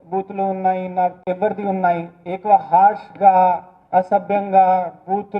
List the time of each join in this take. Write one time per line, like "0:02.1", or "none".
0:01.2